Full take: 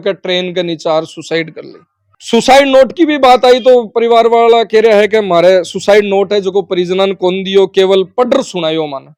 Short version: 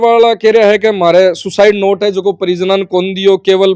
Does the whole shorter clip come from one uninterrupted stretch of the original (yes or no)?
yes